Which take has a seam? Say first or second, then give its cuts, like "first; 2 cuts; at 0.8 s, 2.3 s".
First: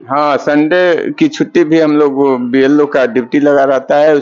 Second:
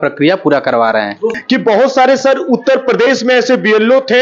second; 1 cut; at 1.3 s